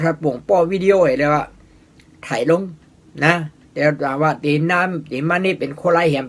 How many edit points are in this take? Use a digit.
0